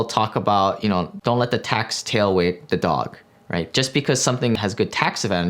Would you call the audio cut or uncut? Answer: cut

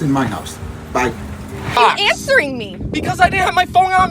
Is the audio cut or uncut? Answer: cut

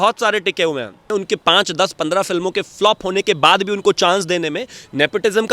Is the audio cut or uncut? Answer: cut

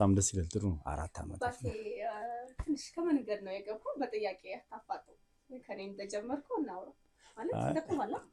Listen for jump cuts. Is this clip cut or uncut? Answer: uncut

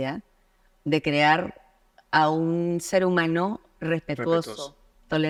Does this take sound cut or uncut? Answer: uncut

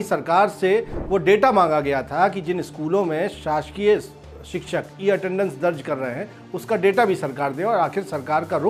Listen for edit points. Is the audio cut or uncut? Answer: uncut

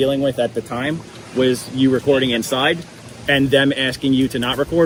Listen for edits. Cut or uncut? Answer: uncut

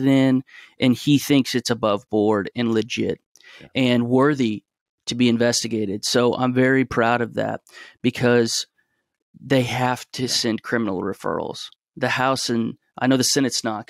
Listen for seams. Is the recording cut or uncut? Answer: uncut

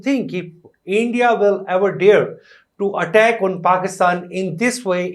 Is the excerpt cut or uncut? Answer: uncut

